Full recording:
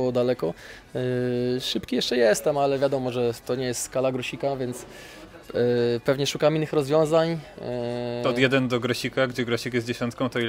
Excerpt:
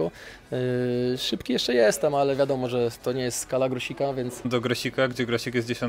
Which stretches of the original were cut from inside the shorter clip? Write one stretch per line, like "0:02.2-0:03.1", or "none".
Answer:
0:04.9-0:08.7